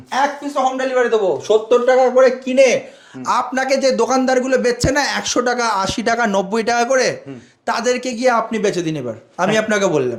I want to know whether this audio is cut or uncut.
uncut